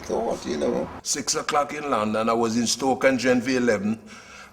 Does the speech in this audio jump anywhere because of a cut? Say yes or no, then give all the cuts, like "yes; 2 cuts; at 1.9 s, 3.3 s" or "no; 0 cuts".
yes; 1 cut; at 1.0 s